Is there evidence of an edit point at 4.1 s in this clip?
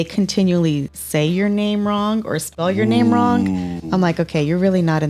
no; 1 cut; at 1.0 s

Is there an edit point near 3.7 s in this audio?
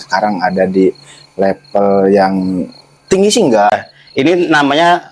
yes; 1 cut; at 3.7 s

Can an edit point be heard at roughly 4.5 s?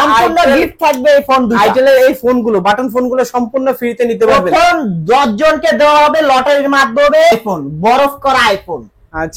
no; 1 cut; at 7.3 s

